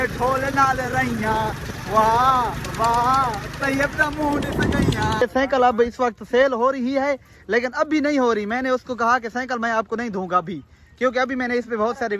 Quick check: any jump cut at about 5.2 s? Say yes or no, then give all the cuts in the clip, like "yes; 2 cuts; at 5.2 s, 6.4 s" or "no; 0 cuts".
yes; 1 cut; at 5.2 s